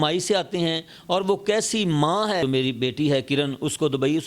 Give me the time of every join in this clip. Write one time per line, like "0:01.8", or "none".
0:02.4